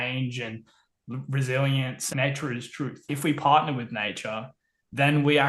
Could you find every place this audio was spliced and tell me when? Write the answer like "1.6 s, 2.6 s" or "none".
2.1 s, 3.0 s